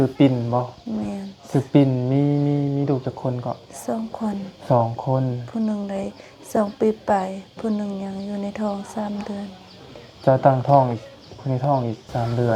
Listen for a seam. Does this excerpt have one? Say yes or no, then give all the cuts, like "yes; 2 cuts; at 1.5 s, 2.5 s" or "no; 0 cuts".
no; 0 cuts